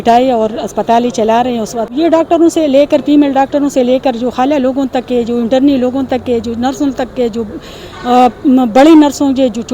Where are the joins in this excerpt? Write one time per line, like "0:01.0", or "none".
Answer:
0:01.9

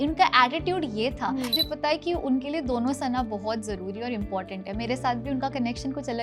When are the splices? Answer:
0:01.5

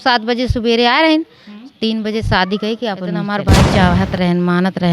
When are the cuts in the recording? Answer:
0:03.6

